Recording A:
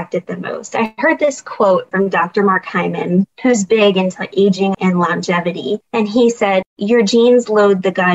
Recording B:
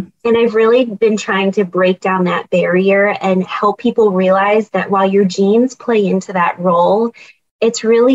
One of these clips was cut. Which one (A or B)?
A